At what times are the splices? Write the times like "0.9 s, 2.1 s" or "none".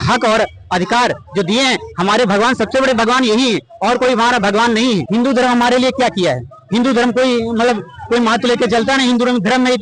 5.1 s